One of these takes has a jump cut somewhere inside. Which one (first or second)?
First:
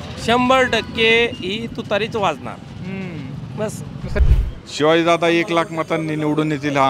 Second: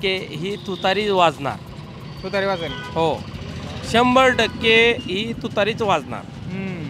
first